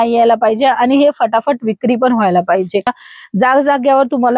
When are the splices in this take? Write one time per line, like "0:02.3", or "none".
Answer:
0:03.0